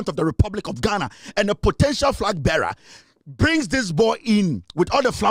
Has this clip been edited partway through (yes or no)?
no